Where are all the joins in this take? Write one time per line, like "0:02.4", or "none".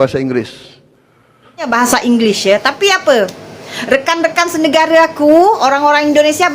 0:01.7